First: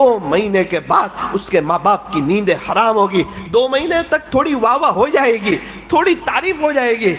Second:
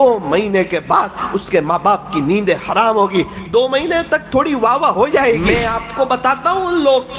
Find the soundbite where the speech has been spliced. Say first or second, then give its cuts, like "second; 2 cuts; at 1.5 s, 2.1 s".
second; 1 cut; at 5.5 s